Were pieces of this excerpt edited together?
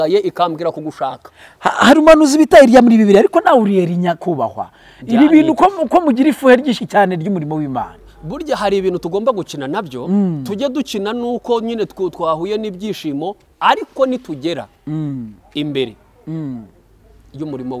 no; 0 cuts

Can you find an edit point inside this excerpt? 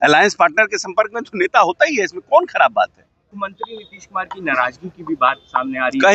yes; 1 cut; at 3.3 s

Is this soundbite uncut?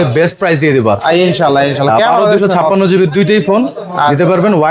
yes; 0 cuts

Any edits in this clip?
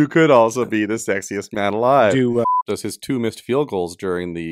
yes; 1 cut; at 2.5 s

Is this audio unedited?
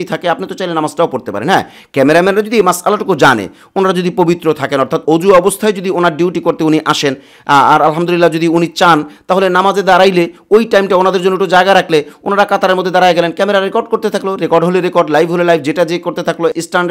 yes; 0 cuts

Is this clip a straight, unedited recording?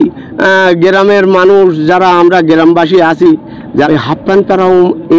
no; 1 cut; at 3.9 s

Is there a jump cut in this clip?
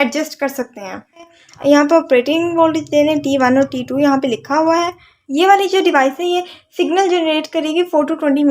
yes; 2 cuts; at 1.4 s, 5.2 s

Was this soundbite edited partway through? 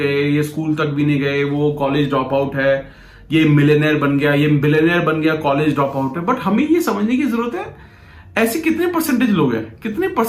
no; 0 cuts

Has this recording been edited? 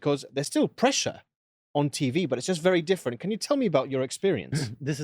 no; 0 cuts

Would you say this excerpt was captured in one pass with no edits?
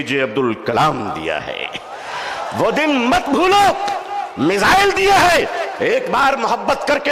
yes; 0 cuts

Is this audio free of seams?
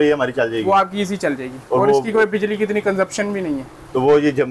yes; 0 cuts

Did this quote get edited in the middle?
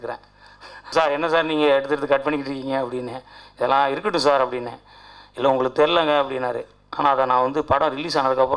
yes; 1 cut; at 0.9 s

